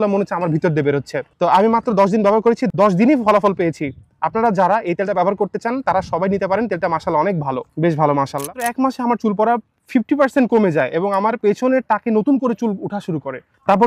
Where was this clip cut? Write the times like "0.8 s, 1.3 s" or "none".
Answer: 8.6 s